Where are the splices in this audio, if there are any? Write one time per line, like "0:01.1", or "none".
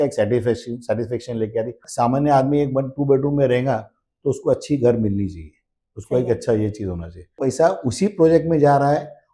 0:01.8
0:07.4